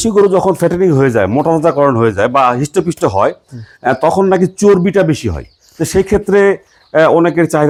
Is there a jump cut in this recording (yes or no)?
no